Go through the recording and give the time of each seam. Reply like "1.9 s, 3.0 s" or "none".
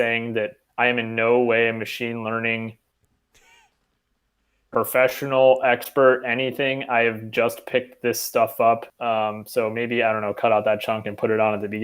8.9 s